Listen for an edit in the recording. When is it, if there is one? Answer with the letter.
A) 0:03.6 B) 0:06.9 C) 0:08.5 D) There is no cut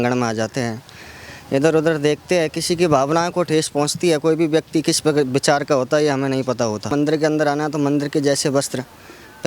B